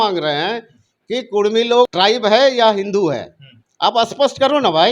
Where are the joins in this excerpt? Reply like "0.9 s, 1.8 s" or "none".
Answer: 1.9 s